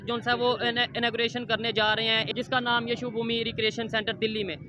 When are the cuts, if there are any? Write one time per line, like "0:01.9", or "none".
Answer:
0:02.2